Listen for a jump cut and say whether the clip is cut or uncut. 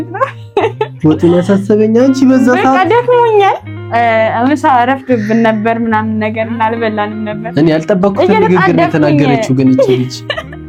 uncut